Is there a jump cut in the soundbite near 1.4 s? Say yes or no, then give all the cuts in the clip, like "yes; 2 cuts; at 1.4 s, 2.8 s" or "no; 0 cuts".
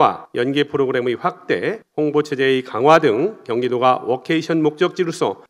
no; 0 cuts